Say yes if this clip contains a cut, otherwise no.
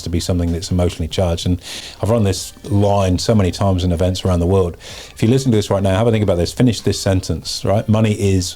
yes